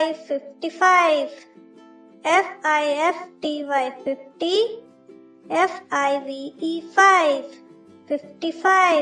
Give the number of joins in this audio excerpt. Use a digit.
0